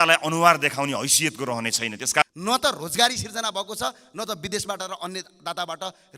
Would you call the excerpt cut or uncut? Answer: cut